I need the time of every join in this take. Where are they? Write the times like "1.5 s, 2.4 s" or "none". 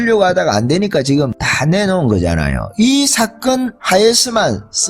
3.8 s

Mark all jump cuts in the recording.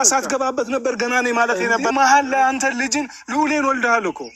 1.9 s

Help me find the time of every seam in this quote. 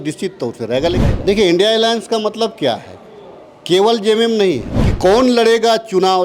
1.0 s, 4.7 s

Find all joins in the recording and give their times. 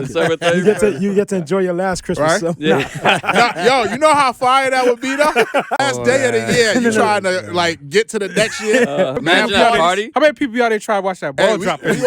5.8 s

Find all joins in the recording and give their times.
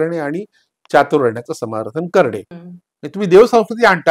2.5 s

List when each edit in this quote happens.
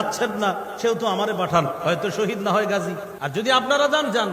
3.1 s

